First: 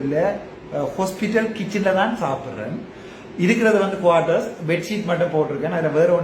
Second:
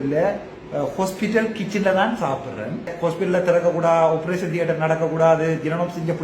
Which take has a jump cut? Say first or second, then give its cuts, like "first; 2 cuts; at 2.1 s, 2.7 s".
second; 1 cut; at 2.9 s